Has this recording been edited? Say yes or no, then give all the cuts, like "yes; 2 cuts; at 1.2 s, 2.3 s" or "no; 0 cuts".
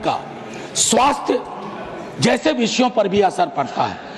no; 0 cuts